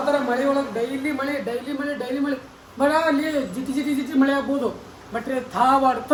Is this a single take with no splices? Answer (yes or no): yes